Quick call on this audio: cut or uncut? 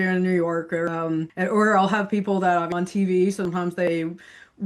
cut